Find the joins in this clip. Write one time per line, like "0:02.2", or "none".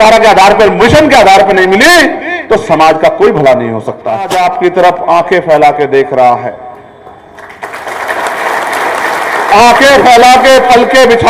0:04.3